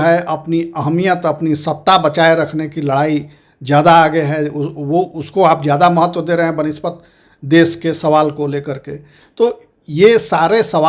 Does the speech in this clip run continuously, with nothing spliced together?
yes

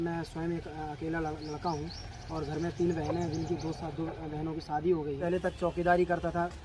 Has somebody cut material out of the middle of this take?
yes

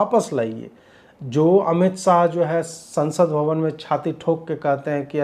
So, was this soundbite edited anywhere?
no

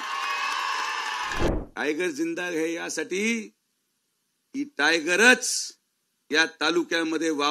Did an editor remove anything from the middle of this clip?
yes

